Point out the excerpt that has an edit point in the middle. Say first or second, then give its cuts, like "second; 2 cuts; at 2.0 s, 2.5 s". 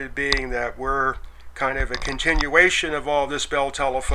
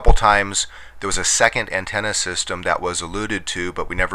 second; 1 cut; at 2.3 s